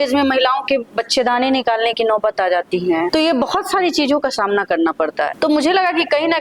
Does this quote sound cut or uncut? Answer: cut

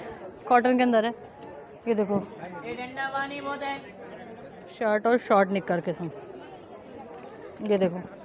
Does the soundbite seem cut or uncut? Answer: cut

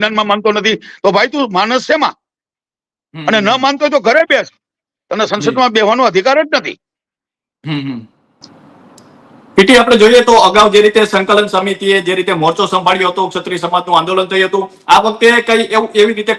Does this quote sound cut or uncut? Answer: uncut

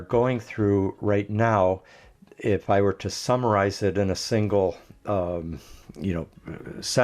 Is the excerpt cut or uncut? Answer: uncut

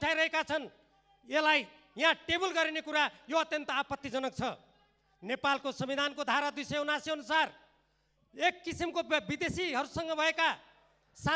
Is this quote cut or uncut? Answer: uncut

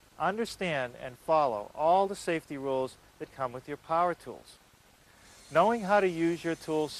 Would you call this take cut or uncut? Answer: uncut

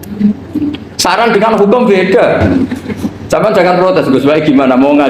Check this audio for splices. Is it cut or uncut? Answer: cut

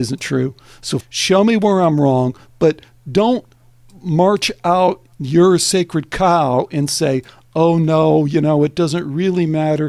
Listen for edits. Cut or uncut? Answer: cut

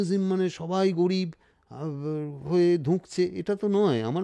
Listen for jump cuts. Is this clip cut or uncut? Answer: uncut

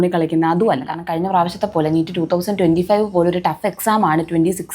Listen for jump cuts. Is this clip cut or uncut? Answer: cut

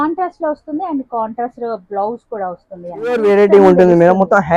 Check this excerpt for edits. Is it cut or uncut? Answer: cut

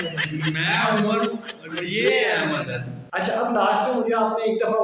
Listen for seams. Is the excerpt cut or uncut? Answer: uncut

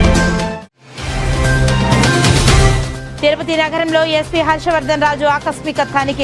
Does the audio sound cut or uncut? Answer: cut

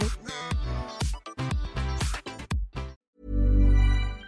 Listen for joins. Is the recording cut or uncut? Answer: cut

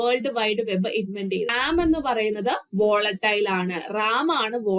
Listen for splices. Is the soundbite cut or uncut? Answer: cut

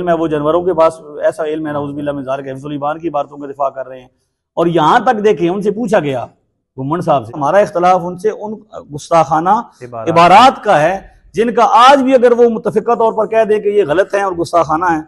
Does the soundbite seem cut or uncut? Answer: cut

